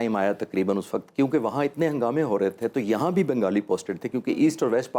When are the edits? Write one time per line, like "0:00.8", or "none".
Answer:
none